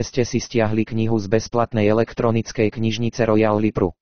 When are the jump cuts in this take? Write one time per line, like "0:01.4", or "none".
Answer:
none